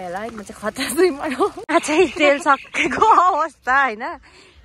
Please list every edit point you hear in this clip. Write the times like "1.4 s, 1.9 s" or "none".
1.6 s